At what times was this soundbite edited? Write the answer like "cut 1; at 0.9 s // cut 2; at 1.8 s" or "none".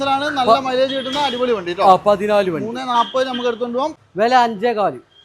cut 1; at 3.9 s